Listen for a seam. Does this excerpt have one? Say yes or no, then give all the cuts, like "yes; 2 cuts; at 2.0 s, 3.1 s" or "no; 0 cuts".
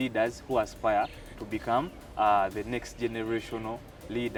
no; 0 cuts